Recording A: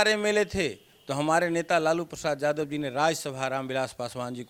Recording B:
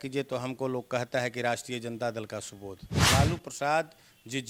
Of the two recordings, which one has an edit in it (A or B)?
B